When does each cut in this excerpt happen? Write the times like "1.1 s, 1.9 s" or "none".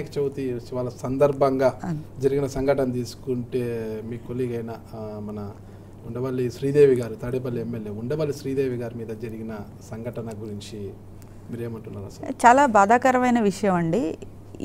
none